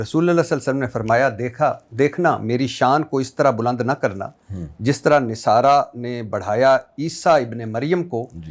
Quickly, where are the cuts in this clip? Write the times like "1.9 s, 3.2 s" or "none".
none